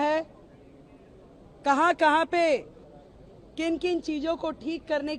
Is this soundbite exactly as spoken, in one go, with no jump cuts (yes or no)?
yes